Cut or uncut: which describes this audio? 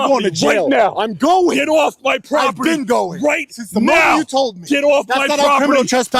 uncut